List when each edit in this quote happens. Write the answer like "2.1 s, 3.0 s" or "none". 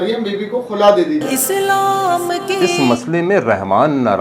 2.7 s